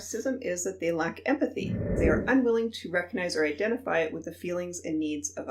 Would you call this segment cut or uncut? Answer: cut